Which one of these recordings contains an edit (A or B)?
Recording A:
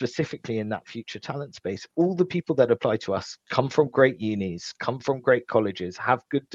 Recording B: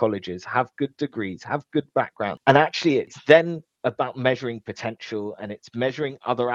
B